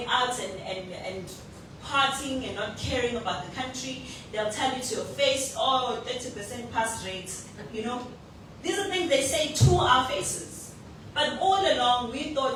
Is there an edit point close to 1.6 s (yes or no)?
no